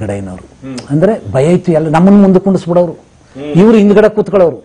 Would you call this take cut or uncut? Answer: uncut